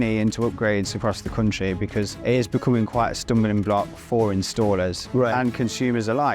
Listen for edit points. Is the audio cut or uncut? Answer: cut